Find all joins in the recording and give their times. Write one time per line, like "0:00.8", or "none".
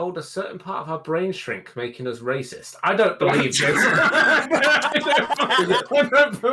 none